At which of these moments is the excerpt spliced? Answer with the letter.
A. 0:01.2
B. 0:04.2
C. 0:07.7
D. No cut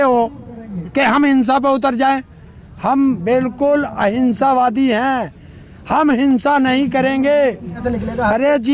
C